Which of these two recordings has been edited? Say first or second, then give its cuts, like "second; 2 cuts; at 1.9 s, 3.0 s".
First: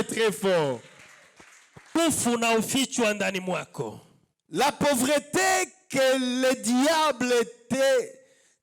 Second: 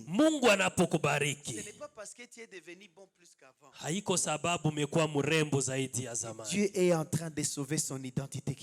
first; 1 cut; at 1.9 s